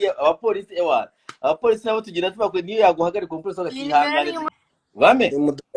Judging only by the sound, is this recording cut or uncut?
cut